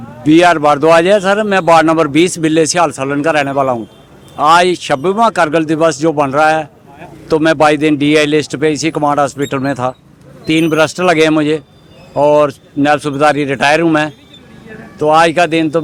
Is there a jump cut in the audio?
no; 0 cuts

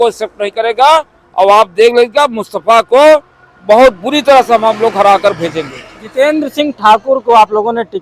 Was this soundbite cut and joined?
no; 0 cuts

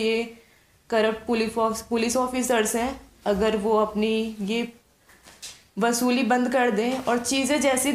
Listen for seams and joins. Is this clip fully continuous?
yes; 0 cuts

